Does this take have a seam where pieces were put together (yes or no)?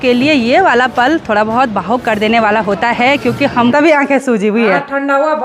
yes